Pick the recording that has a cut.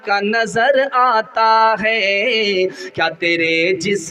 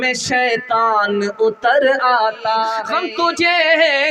second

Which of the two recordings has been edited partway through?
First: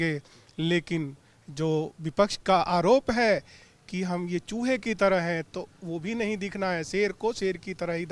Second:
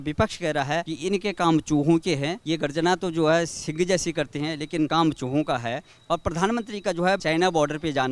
second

